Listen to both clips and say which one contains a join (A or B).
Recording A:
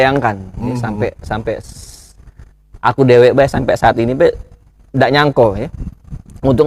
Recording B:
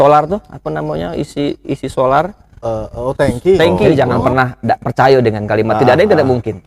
B